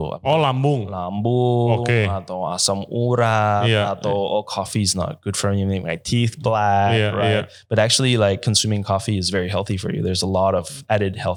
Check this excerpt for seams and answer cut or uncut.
uncut